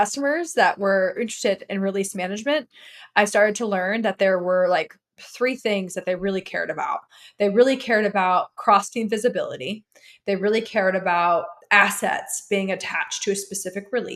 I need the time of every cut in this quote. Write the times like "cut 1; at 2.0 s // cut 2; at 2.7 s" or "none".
cut 1; at 1.1 s // cut 2; at 11.5 s